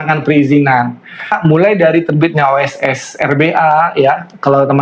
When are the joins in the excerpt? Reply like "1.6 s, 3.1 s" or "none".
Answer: 1.3 s